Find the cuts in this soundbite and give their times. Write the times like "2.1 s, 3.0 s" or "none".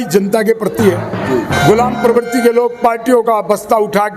1.5 s

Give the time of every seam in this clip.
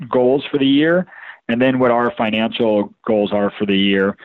none

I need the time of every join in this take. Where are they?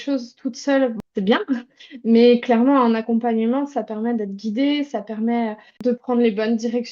1.0 s, 5.7 s

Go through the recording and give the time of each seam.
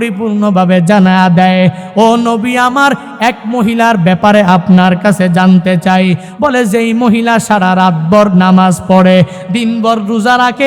6.3 s

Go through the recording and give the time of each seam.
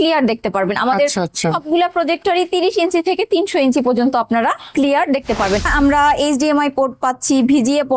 5.7 s

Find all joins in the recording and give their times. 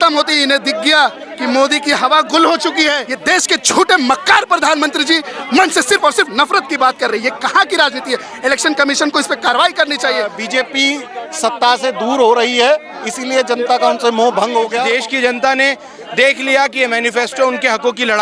3.1 s, 10.4 s, 14.9 s

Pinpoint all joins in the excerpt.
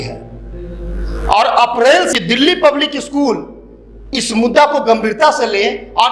2.1 s

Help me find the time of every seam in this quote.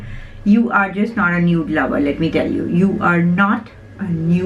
none

